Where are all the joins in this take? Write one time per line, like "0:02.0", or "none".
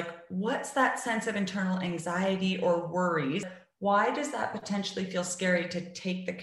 0:03.5